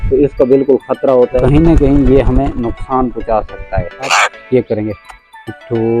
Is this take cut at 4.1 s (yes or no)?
yes